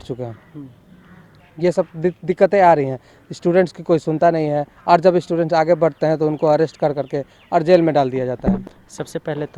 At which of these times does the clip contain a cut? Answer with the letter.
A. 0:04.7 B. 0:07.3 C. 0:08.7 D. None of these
C